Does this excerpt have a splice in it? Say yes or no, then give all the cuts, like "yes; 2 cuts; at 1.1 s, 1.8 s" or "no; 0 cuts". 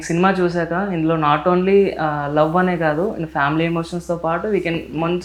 no; 0 cuts